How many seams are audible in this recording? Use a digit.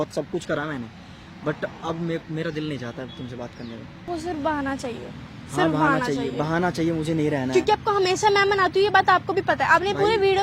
1